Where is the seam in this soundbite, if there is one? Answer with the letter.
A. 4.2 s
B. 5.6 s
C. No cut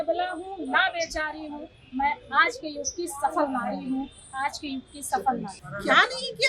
B